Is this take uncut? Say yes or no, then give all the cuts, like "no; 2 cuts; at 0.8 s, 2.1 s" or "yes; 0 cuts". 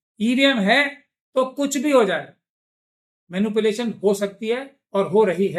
yes; 0 cuts